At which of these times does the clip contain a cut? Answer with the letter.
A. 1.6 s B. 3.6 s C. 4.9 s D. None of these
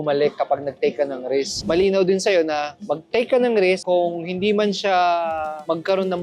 A